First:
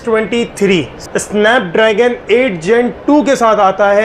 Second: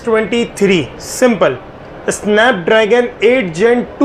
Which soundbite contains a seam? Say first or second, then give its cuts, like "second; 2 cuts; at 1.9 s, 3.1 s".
first; 1 cut; at 1.0 s